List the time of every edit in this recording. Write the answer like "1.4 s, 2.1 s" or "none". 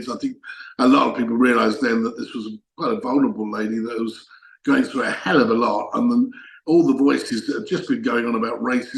none